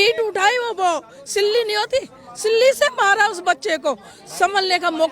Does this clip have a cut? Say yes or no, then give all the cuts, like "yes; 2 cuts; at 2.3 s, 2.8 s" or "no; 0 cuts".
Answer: no; 0 cuts